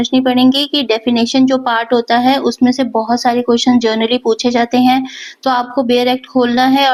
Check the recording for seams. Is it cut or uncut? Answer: uncut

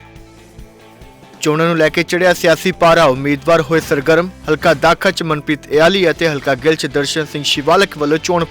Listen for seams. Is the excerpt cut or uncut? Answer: cut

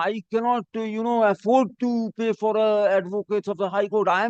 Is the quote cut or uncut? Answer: uncut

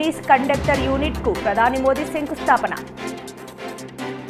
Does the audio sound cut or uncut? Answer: uncut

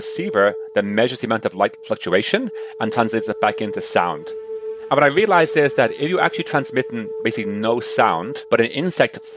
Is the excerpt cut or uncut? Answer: cut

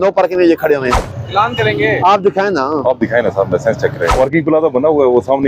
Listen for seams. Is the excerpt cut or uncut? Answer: cut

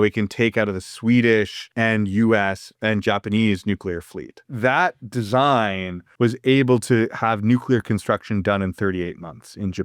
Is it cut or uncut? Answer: cut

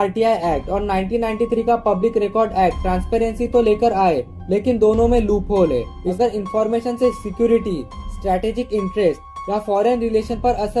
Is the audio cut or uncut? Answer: cut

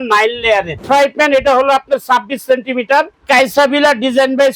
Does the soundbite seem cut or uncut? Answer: cut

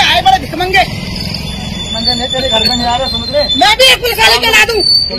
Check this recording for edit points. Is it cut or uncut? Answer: uncut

